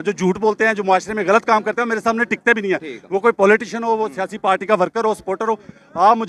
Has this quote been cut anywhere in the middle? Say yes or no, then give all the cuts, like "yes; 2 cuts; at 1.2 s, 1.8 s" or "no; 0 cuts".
no; 0 cuts